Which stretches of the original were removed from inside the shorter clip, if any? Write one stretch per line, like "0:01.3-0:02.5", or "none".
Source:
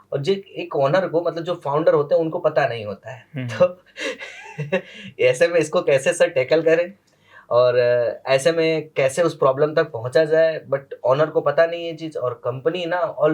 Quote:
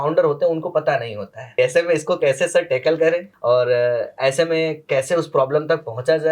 0:03.1-0:05.1
0:07.0-0:07.4